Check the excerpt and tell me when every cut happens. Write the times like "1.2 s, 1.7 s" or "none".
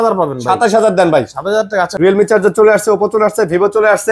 1.9 s